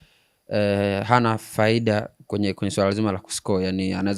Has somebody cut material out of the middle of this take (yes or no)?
no